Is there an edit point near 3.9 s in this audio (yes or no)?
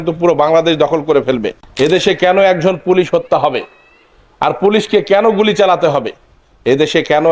no